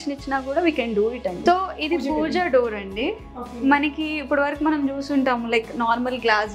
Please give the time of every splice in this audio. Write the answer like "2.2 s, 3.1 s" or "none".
1.4 s